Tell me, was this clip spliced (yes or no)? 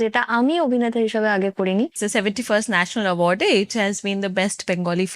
yes